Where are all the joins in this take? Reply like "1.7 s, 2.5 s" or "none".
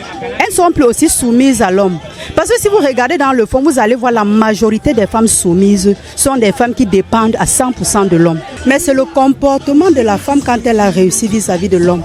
8.5 s